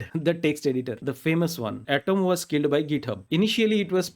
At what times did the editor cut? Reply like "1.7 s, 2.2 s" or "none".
1.8 s